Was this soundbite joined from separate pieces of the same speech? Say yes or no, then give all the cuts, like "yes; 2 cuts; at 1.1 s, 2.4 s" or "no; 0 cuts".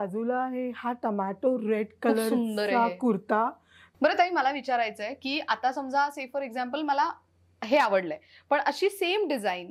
yes; 1 cut; at 3.8 s